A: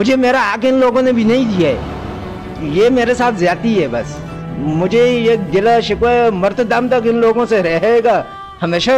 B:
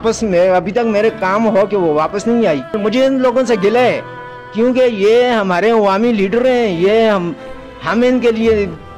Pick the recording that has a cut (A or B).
B